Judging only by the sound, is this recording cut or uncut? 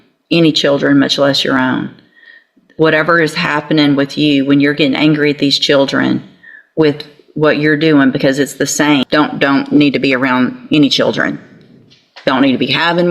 cut